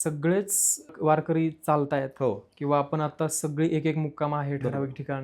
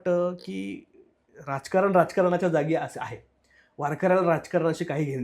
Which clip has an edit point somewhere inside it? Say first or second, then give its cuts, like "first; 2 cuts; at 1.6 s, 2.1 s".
first; 1 cut; at 1.0 s